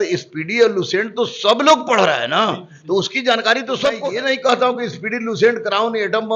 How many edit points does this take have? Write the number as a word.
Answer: one